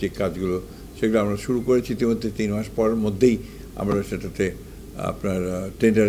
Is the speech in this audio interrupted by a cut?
no; 0 cuts

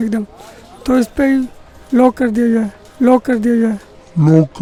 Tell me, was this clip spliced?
no; 0 cuts

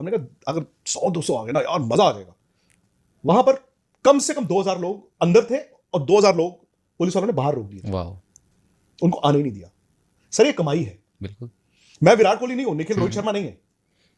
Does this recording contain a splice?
no; 0 cuts

